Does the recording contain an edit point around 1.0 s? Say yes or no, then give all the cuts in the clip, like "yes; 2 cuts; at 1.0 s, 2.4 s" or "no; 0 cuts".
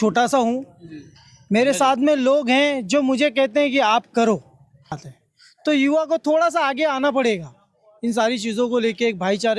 no; 1 cut; at 5.1 s